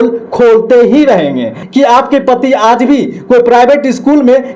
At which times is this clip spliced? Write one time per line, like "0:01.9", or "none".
0:01.6